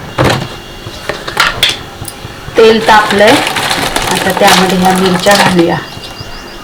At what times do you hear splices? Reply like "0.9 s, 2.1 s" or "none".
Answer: none